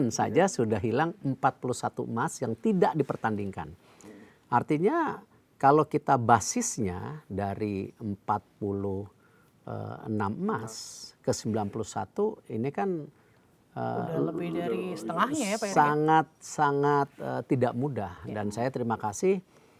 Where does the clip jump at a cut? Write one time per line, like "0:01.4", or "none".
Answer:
none